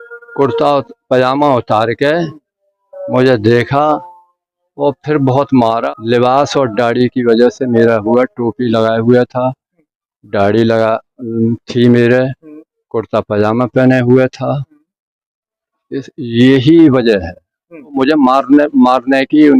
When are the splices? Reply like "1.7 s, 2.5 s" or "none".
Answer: 5.7 s, 18.0 s